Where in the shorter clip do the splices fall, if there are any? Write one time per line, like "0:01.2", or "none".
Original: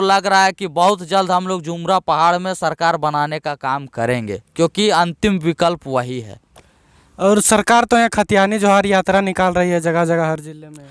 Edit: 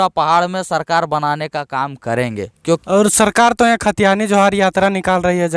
0:02.8